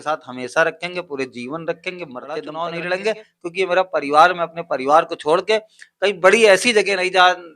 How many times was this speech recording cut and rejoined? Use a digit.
1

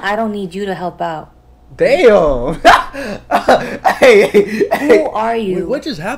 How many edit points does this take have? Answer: 0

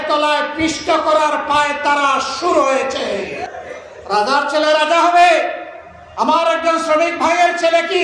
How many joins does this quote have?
1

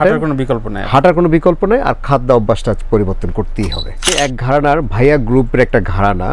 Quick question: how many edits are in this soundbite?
1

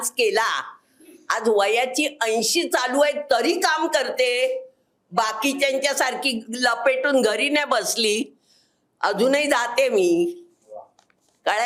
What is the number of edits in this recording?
0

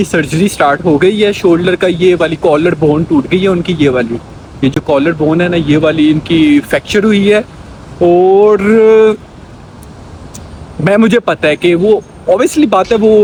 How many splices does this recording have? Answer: 0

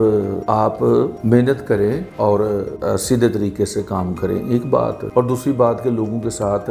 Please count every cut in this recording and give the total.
0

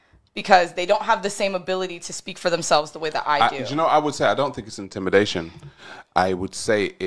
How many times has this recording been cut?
1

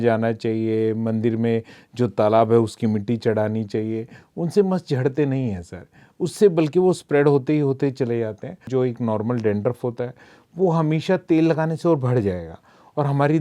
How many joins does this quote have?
1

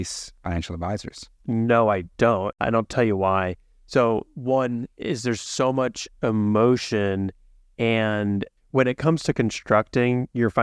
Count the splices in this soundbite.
2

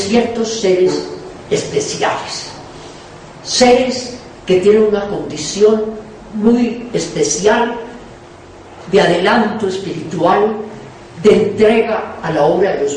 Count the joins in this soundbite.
1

